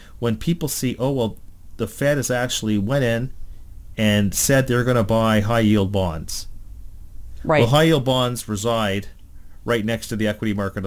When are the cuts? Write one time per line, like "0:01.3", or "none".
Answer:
none

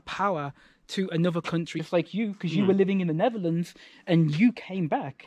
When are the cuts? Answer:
0:01.7

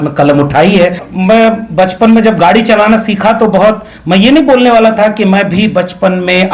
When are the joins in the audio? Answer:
0:01.0

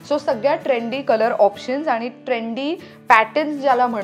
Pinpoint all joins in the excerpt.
none

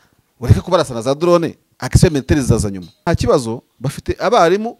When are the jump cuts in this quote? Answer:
0:03.1

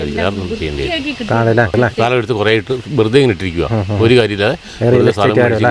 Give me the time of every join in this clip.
0:01.7

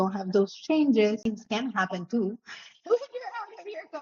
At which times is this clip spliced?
0:01.2

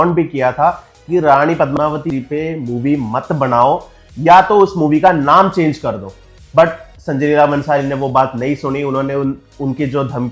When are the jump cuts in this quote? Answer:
none

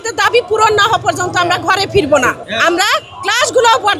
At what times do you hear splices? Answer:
0:02.5

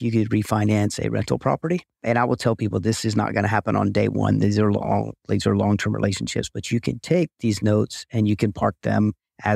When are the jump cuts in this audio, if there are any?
0:01.9

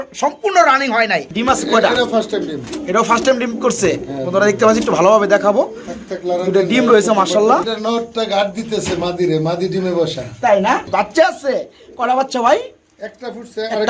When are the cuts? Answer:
0:01.3
0:07.7
0:10.8

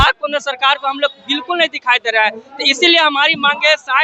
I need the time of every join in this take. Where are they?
none

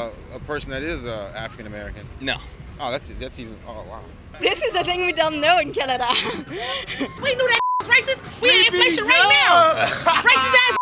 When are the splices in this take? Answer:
0:04.2
0:07.2

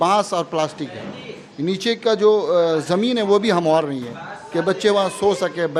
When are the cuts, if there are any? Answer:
none

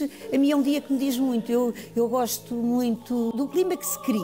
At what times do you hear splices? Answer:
0:03.3

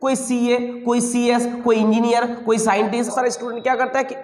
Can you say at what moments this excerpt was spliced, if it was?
0:03.1

